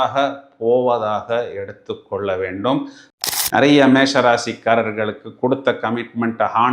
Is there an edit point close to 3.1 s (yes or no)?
yes